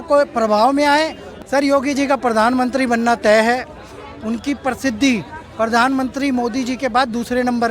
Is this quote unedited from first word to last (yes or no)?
no